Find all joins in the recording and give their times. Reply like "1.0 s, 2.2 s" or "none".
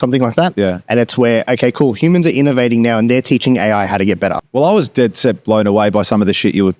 4.4 s